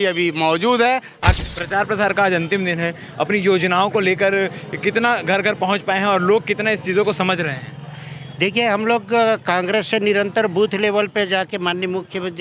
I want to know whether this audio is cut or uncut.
cut